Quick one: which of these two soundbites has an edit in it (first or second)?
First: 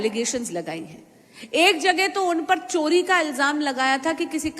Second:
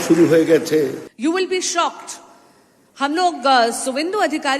second